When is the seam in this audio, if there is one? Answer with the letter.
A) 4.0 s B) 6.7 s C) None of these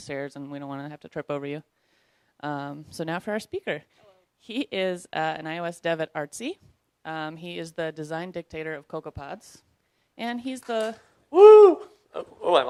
C